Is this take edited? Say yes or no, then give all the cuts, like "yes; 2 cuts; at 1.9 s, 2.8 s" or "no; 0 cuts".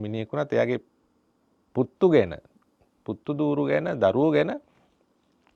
no; 0 cuts